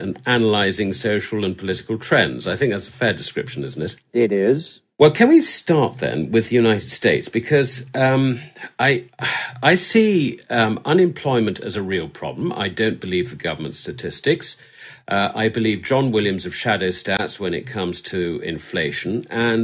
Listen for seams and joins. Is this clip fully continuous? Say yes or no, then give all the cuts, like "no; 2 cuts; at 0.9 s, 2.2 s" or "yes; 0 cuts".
no; 1 cut; at 1.6 s